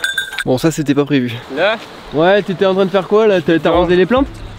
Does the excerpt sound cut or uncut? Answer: cut